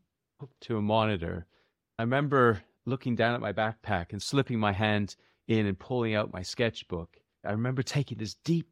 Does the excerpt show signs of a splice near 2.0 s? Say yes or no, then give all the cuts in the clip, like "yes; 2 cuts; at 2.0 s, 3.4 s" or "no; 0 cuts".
yes; 4 cuts; at 2.0 s, 2.7 s, 4.2 s, 7.4 s